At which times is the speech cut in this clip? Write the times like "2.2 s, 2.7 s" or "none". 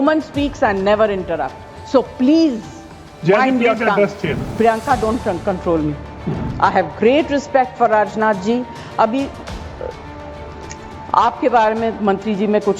4.4 s, 6.4 s